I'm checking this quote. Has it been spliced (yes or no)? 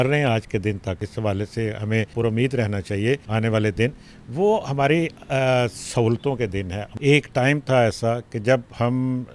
yes